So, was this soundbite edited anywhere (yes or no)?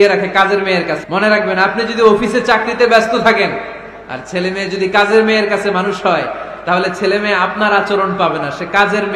yes